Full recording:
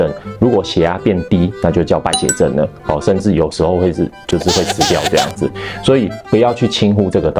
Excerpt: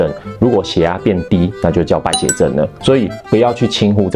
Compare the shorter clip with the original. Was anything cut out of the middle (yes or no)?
yes